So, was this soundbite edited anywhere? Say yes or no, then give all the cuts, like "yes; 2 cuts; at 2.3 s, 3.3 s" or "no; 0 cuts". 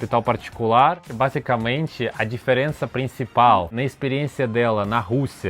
yes; 2 cuts; at 1.1 s, 3.8 s